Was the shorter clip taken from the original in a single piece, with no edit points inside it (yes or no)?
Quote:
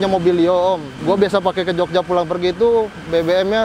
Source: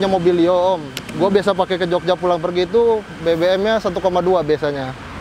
no